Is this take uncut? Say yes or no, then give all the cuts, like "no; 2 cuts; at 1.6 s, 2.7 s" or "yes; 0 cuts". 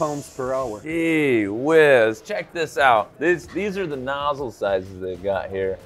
yes; 0 cuts